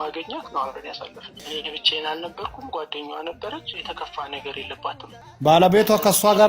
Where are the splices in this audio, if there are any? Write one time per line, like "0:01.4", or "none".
0:05.2